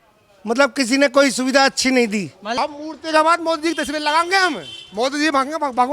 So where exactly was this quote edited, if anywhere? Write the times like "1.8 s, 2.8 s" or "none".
2.4 s